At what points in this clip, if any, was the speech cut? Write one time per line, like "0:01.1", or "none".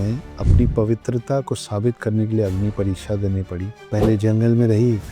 none

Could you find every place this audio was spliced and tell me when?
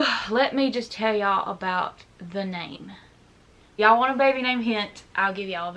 0:03.8

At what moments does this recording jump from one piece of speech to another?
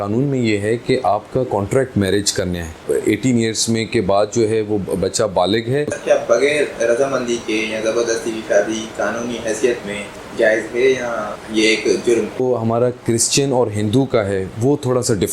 0:02.8
0:05.9
0:10.2
0:11.4
0:12.4

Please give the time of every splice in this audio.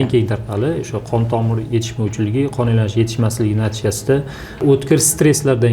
0:04.6

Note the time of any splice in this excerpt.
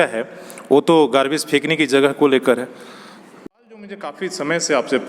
0:03.5

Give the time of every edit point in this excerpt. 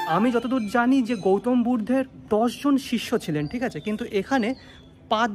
0:02.2

